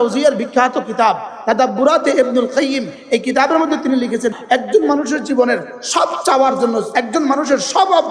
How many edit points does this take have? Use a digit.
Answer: 2